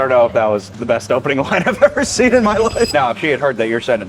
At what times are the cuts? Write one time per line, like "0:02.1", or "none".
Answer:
0:02.9